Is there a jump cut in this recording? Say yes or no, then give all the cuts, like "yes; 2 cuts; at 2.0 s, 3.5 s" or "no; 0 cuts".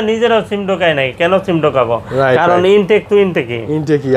no; 0 cuts